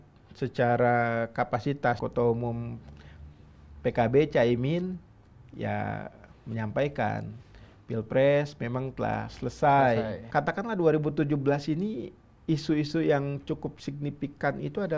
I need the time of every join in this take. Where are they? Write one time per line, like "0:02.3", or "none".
0:02.0
0:10.2